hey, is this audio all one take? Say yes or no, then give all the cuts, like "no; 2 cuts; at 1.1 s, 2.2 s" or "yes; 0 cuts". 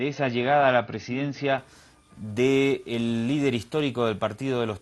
no; 1 cut; at 1.6 s